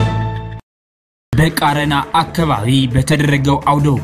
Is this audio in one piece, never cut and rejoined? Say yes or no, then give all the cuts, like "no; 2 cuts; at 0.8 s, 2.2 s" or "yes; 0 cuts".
no; 1 cut; at 1.3 s